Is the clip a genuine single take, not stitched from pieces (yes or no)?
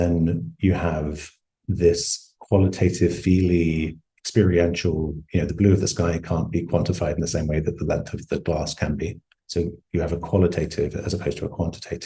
yes